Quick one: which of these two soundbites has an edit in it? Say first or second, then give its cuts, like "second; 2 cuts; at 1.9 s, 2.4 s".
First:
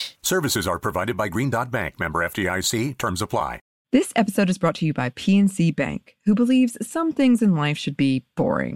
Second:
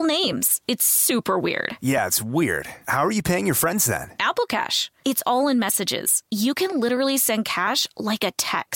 first; 1 cut; at 3.7 s